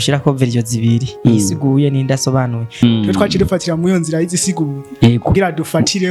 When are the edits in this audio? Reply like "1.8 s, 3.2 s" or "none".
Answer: 2.8 s